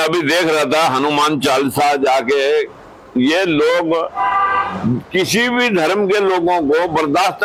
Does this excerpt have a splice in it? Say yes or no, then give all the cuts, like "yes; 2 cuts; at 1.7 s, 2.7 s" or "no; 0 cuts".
no; 0 cuts